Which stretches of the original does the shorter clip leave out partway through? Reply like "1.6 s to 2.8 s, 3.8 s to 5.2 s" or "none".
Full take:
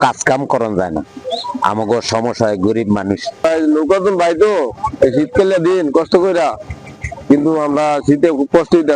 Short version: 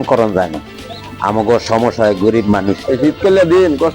3.3 s to 5.0 s

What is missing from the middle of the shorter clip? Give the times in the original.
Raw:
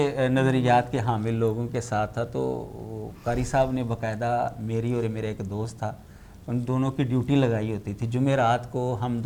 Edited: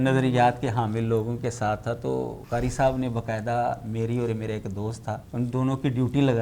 2.7 s to 3.1 s, 6.0 s to 6.4 s

